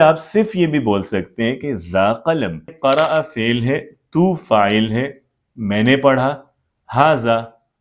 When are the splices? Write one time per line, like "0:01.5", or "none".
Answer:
0:02.7